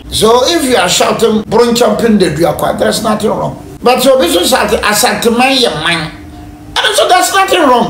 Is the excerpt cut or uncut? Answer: cut